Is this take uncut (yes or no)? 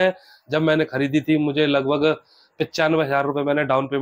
yes